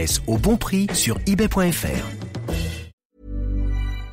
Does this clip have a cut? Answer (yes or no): yes